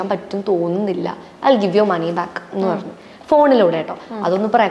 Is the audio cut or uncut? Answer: uncut